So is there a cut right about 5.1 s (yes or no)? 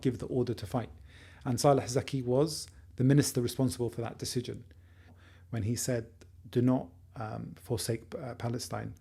yes